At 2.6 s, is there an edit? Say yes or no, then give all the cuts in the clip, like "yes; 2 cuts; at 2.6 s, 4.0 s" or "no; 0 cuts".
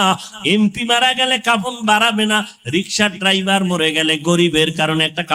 no; 0 cuts